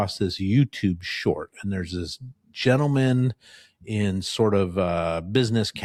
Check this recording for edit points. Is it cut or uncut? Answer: uncut